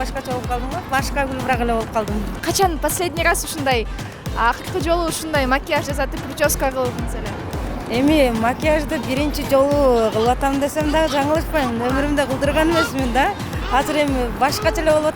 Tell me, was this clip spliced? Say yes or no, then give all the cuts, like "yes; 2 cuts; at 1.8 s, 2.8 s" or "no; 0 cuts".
no; 0 cuts